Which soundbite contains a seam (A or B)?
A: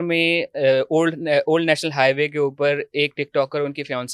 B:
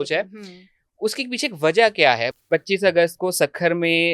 B